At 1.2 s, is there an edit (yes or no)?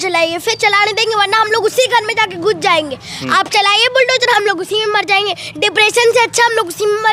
no